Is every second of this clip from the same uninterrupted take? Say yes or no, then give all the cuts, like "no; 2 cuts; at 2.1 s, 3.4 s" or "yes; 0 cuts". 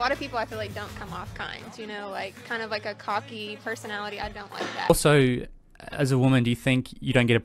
yes; 0 cuts